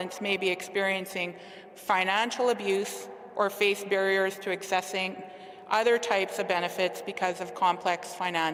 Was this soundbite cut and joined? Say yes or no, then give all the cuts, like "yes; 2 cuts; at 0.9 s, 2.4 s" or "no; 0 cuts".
no; 0 cuts